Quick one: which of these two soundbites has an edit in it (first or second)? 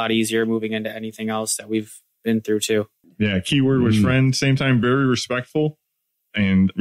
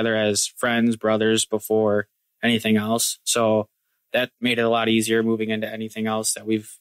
first